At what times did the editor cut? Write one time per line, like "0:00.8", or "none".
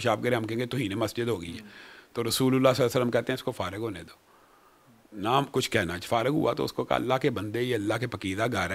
none